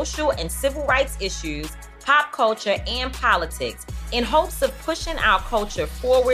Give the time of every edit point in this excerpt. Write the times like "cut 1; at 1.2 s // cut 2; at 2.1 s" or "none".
none